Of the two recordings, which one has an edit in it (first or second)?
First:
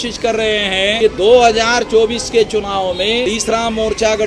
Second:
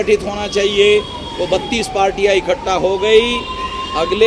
first